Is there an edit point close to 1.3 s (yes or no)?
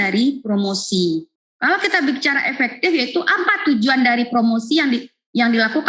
yes